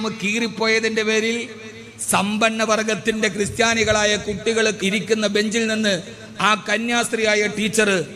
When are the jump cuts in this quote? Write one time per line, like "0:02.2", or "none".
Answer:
0:04.8